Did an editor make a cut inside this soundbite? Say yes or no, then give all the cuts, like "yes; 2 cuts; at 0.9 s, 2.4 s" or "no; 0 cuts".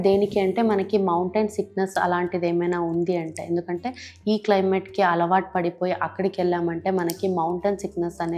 no; 0 cuts